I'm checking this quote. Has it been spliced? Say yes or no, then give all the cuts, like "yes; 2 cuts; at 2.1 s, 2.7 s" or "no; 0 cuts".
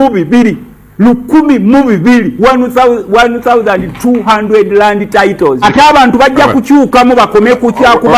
yes; 1 cut; at 5.6 s